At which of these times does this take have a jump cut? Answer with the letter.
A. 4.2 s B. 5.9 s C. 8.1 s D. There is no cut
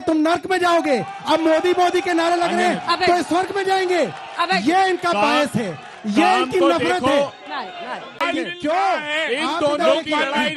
D